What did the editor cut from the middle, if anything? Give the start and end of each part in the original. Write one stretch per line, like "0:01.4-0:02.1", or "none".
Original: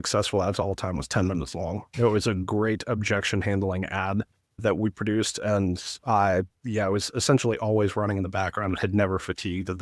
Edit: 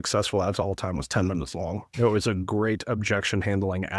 none